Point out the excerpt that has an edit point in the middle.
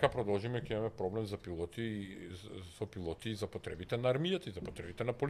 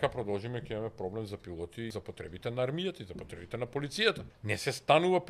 second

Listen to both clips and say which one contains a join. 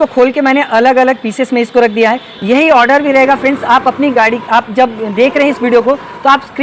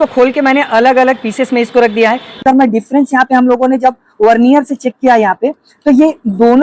second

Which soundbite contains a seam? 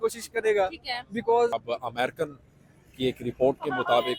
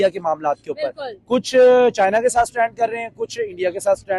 first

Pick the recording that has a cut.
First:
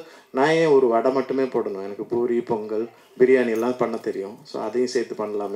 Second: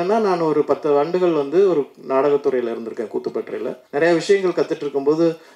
second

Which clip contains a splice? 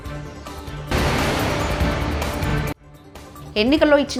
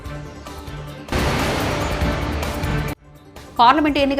second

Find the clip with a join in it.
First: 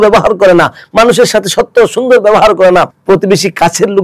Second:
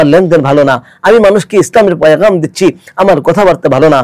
first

